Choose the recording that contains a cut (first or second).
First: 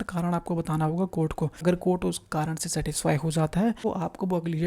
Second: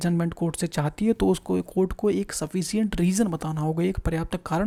first